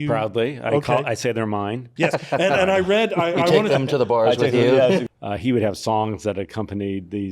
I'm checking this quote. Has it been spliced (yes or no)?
yes